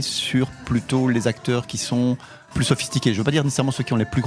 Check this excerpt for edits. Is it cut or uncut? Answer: uncut